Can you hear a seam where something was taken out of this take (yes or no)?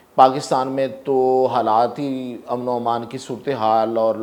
no